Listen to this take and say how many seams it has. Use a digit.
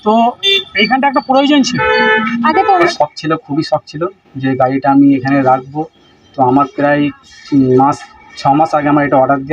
1